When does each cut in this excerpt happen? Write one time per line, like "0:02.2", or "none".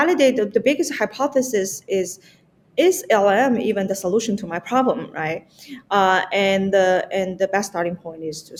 none